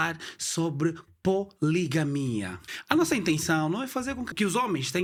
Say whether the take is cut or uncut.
uncut